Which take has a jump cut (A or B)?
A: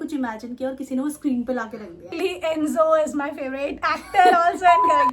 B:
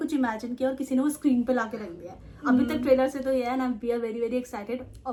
A